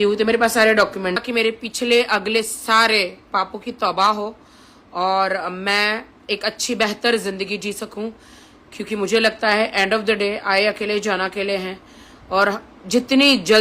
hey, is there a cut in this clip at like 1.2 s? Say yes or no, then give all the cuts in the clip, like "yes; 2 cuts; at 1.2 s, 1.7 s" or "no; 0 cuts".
yes; 1 cut; at 1.2 s